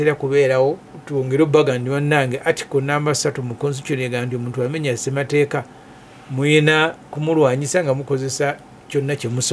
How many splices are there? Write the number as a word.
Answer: one